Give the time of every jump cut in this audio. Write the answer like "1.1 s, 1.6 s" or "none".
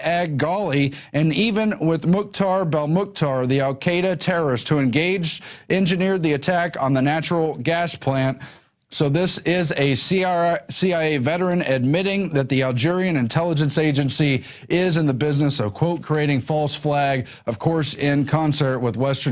17.9 s